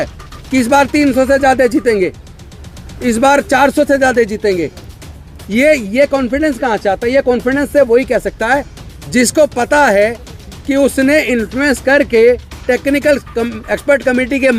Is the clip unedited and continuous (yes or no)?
yes